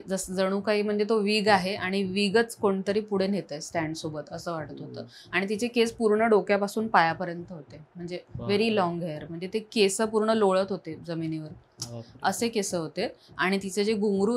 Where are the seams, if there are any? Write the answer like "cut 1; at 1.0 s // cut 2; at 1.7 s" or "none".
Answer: none